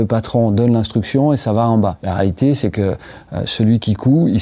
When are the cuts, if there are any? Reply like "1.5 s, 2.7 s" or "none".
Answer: none